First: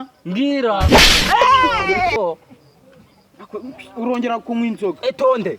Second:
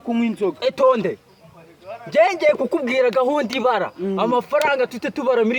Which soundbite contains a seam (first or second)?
first